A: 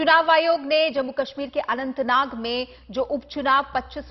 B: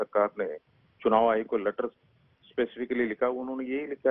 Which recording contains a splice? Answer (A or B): B